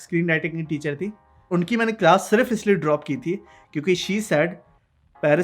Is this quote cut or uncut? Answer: cut